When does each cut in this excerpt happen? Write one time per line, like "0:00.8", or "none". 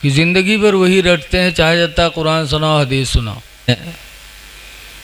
0:03.7